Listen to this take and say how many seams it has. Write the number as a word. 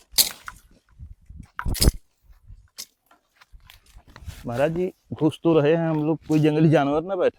zero